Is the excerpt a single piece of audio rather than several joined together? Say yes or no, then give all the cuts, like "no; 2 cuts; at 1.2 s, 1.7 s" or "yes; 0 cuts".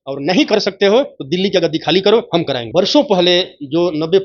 no; 1 cut; at 2.6 s